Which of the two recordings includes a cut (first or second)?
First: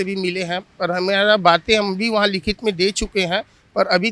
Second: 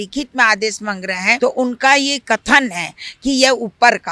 second